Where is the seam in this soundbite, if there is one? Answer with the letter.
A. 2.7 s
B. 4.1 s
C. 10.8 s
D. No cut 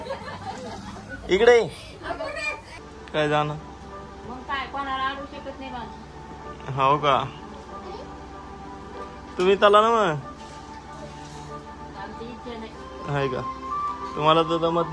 A